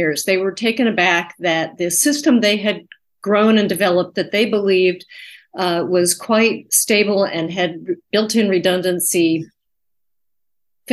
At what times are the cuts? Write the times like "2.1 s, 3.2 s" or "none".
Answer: none

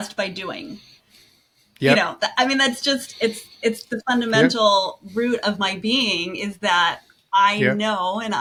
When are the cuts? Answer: none

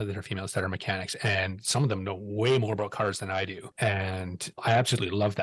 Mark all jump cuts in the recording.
3.6 s, 4.4 s

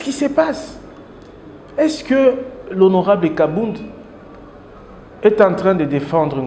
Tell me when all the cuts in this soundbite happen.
none

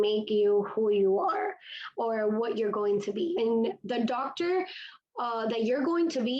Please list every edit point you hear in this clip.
3.4 s

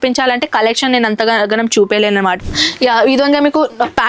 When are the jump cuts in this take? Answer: 2.4 s

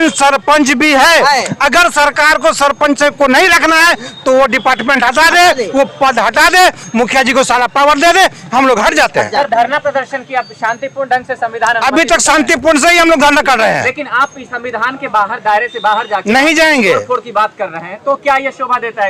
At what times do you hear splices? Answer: none

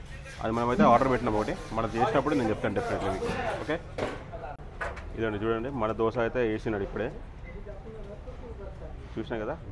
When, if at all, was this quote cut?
none

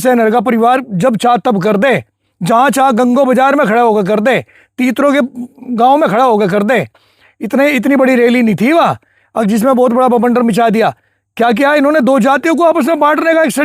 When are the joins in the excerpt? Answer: none

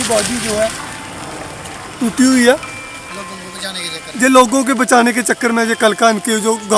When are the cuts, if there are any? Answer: none

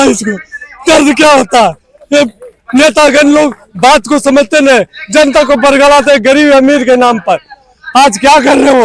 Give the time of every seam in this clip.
none

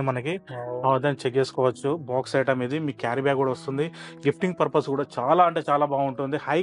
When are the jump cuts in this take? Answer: none

